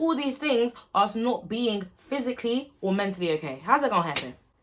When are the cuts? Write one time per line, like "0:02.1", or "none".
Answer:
none